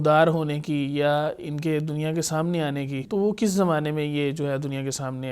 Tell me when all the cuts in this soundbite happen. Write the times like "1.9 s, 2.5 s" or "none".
3.0 s